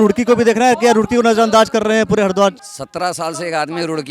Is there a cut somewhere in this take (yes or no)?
yes